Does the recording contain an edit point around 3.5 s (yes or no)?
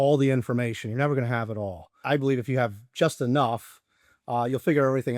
no